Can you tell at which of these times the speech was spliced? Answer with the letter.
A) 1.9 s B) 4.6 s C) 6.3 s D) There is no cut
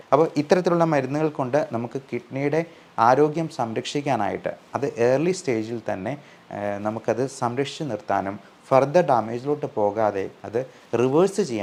D